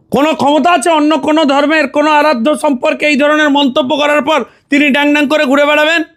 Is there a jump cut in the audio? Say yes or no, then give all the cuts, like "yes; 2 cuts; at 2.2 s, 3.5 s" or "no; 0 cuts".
no; 0 cuts